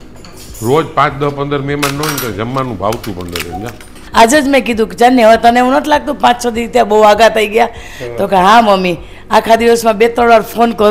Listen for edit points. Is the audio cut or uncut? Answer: cut